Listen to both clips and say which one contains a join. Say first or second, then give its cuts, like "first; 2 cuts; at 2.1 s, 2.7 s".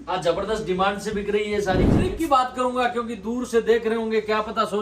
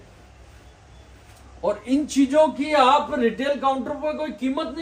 first; 1 cut; at 2.1 s